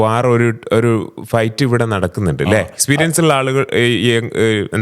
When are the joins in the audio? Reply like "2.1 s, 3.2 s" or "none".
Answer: none